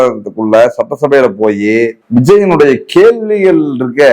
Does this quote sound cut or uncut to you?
cut